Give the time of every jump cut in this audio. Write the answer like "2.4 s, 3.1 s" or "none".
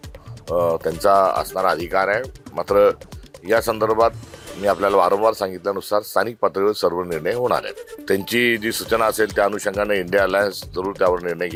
none